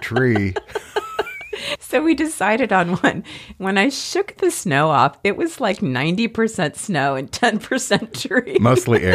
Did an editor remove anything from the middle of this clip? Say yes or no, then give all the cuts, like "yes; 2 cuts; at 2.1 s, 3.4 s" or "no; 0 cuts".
no; 0 cuts